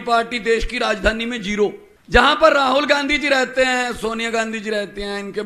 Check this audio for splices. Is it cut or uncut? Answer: cut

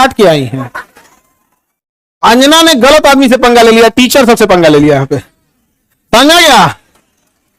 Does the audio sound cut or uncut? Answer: uncut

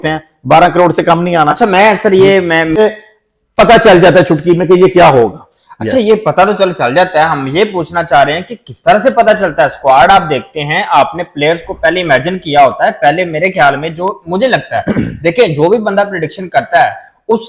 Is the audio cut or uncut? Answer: cut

